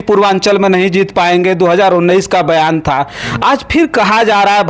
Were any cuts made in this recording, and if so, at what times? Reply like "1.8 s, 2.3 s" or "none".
none

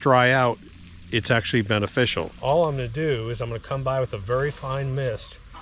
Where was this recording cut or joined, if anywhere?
2.3 s

